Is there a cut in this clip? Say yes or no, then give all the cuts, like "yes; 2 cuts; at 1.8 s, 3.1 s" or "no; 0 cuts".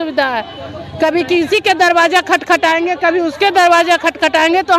no; 0 cuts